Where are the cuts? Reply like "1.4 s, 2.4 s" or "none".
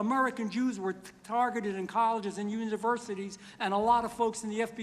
none